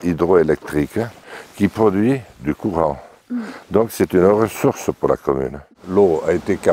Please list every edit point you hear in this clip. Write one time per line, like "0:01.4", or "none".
0:01.2
0:05.7